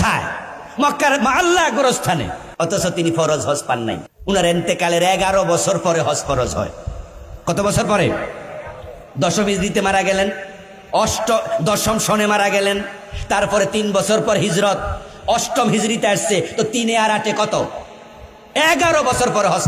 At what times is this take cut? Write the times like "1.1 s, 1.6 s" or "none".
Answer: 2.4 s, 4.1 s